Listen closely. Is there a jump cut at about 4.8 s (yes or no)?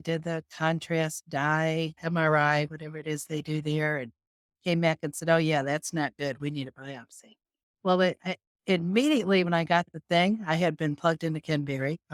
no